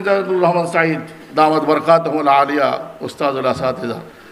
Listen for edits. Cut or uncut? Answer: cut